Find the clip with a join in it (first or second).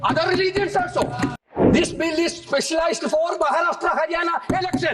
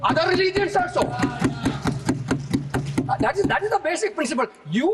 first